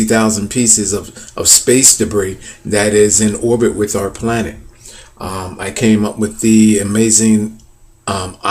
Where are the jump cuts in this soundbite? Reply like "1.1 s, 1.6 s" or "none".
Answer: 2.2 s